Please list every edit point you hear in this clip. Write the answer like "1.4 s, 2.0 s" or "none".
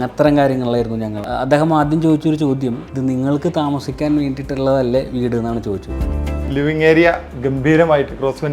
1.2 s, 5.9 s